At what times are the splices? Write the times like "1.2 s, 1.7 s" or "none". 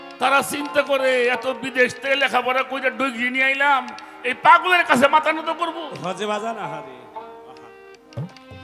none